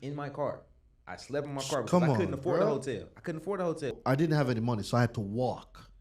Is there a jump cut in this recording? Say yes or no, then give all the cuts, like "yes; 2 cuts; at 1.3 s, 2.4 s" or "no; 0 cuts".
yes; 1 cut; at 3.9 s